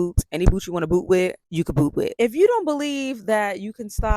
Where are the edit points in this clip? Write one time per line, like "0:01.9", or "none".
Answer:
0:02.1